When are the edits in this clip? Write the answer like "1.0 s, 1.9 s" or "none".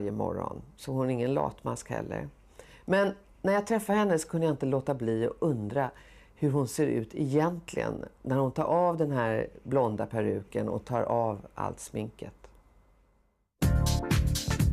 10.8 s